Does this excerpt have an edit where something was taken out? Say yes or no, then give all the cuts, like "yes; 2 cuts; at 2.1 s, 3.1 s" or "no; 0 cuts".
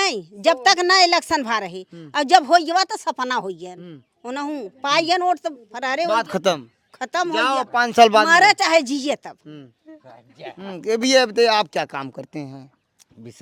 no; 0 cuts